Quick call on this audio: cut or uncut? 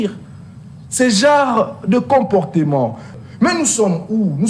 cut